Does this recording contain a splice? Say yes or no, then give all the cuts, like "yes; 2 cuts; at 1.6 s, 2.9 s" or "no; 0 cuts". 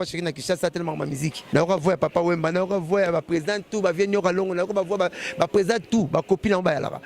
yes; 1 cut; at 1.4 s